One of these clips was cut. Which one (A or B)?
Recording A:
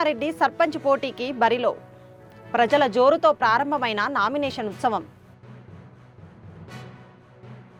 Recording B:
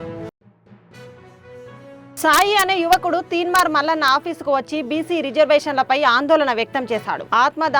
B